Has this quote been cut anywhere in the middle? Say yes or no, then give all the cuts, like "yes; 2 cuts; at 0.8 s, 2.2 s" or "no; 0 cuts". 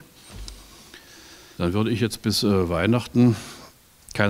yes; 1 cut; at 1.5 s